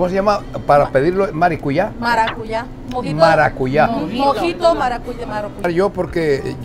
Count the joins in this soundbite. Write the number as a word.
one